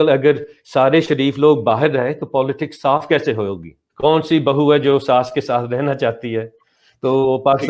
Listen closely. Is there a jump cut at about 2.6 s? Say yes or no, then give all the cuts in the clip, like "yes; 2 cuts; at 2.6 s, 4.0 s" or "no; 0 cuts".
no; 1 cut; at 3.8 s